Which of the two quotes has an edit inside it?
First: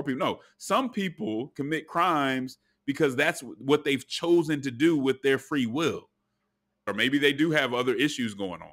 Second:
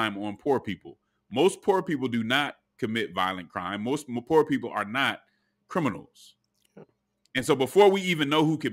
first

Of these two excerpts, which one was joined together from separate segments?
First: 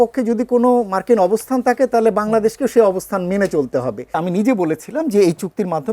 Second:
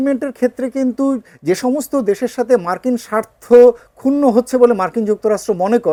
first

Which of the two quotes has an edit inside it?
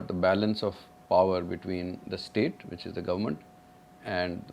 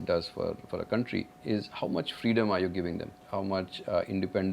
second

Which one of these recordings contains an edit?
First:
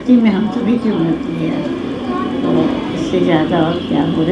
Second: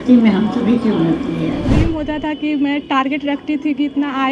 second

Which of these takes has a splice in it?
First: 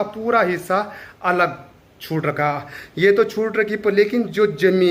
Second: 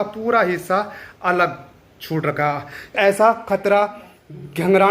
second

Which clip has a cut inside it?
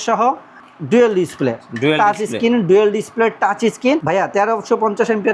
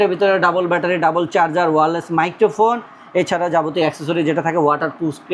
first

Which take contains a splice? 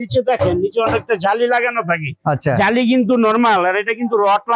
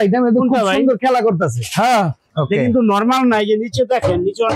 second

